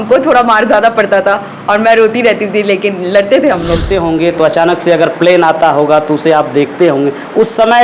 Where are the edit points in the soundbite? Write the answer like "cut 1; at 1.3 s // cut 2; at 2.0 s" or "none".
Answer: cut 1; at 3.9 s